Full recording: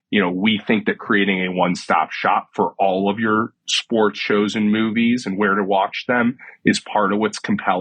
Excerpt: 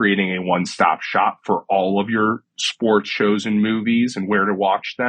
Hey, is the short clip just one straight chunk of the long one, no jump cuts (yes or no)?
yes